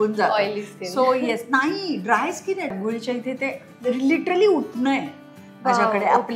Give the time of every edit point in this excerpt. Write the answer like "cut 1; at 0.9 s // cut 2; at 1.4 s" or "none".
cut 1; at 2.7 s